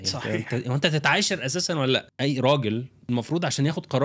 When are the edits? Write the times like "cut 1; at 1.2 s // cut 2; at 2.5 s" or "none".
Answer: cut 1; at 2.1 s // cut 2; at 3.0 s